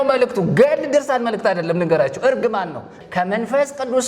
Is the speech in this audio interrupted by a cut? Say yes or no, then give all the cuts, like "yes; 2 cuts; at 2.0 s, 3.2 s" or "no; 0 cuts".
yes; 1 cut; at 2.9 s